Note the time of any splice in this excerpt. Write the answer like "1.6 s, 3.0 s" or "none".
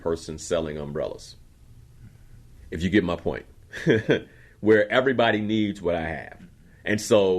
2.6 s